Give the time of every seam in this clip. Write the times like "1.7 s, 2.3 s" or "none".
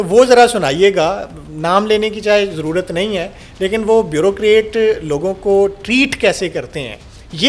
none